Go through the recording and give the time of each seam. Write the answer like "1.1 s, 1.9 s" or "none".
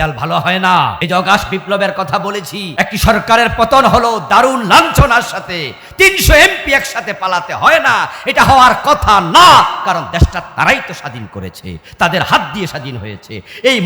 1.0 s, 2.6 s